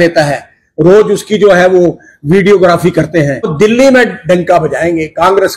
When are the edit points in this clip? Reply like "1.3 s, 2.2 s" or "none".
3.5 s